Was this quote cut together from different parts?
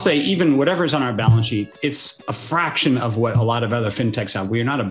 yes; 1 cut; at 2.1 s

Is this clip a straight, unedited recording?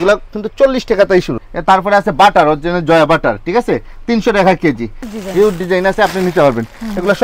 no; 2 cuts; at 1.4 s, 5.0 s

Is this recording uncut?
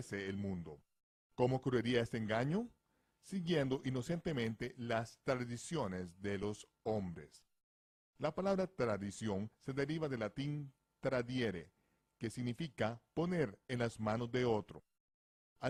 yes; 0 cuts

